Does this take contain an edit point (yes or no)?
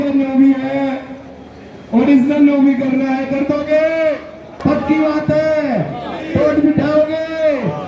yes